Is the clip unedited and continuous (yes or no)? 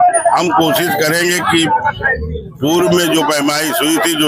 yes